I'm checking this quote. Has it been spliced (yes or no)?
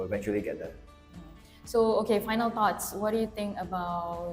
no